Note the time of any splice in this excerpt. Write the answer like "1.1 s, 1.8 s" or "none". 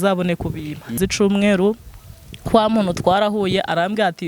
0.9 s